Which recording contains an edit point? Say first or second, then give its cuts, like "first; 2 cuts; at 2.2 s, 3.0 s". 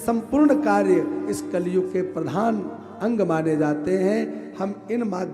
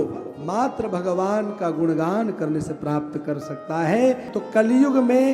second; 1 cut; at 4.3 s